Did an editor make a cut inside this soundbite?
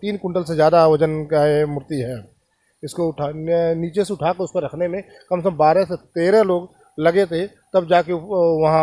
no; 0 cuts

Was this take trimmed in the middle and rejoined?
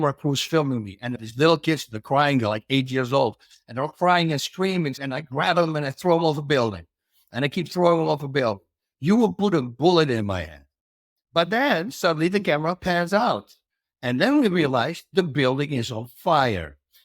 yes; 2 cuts; at 1.2 s, 5.1 s

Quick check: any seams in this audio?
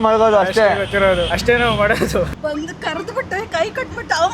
yes; 2 cuts; at 1.4 s, 2.4 s

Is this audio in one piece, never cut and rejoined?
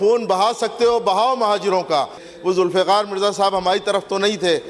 no; 1 cut; at 2.3 s

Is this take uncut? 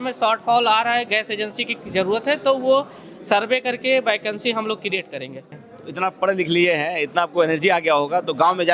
no; 1 cut; at 5.4 s

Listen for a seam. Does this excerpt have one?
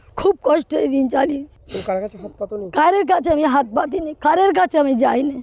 no; 0 cuts

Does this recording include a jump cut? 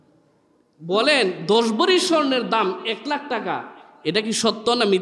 no; 0 cuts

